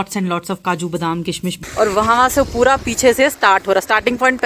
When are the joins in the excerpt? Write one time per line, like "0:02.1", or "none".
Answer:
0:01.5